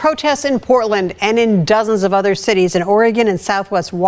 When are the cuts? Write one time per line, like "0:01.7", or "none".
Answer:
0:01.5